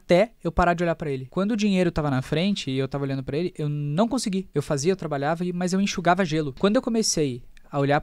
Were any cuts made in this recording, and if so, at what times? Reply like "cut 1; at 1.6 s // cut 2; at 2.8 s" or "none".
cut 1; at 1.2 s // cut 2; at 4.5 s // cut 3; at 6.5 s